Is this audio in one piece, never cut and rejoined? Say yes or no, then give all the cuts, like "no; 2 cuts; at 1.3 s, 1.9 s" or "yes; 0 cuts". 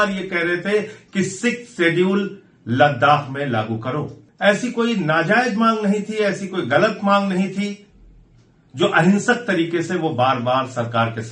no; 1 cut; at 4.2 s